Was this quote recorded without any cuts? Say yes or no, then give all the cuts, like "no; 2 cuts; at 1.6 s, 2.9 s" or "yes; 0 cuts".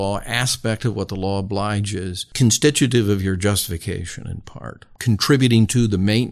no; 2 cuts; at 2.2 s, 4.9 s